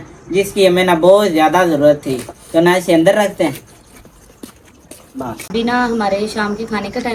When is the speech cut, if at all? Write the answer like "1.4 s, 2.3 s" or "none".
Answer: none